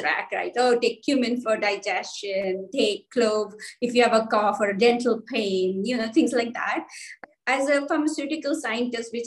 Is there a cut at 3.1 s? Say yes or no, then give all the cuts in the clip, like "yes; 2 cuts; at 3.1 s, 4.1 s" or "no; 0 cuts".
no; 1 cut; at 7.2 s